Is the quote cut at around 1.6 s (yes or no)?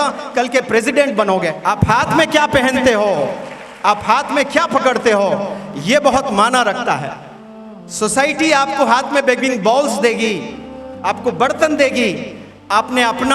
yes